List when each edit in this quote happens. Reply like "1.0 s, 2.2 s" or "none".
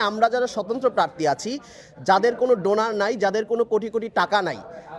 none